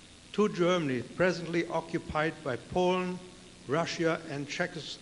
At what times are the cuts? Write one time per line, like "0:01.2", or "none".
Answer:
none